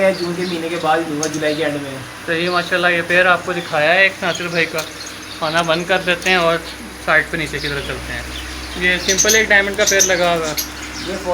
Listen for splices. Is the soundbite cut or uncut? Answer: uncut